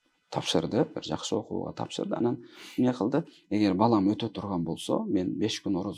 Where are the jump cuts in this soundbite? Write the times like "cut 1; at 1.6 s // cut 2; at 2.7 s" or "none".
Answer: none